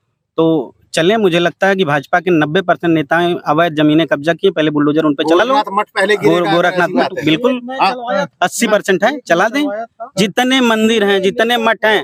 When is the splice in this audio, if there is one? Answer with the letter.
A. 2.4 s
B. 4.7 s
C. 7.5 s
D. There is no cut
D